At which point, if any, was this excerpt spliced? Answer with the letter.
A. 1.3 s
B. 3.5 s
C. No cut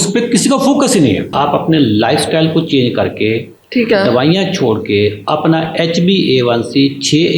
A